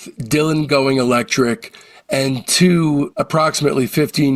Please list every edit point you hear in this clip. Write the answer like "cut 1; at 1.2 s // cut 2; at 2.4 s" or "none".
none

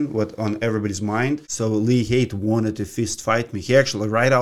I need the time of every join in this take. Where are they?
cut 1; at 1.5 s

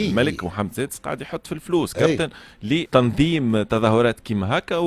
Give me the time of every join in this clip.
cut 1; at 2.9 s

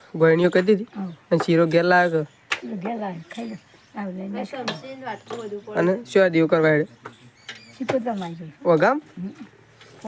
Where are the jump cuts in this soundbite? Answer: none

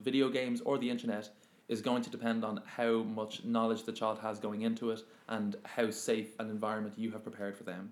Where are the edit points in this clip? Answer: cut 1; at 6.3 s

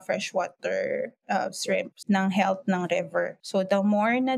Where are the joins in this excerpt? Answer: cut 1; at 2.0 s // cut 2; at 3.4 s

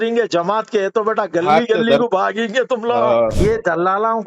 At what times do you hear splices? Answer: cut 1; at 3.3 s

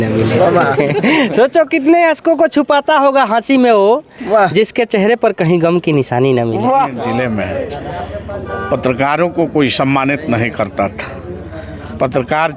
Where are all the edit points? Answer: cut 1; at 7.0 s

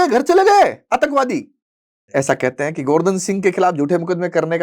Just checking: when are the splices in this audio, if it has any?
cut 1; at 2.1 s

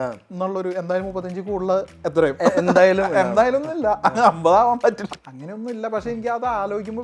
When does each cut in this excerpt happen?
cut 1; at 5.0 s

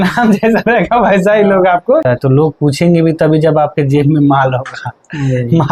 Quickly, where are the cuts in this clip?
cut 1; at 2.0 s

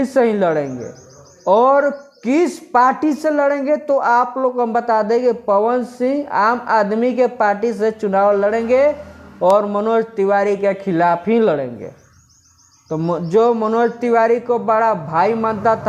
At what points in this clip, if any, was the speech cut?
none

